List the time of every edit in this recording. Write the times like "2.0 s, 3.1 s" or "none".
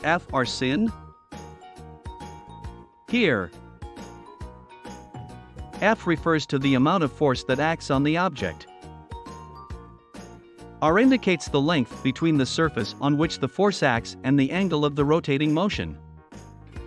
8.6 s, 10.8 s, 15.9 s